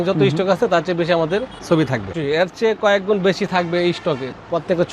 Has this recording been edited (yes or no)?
yes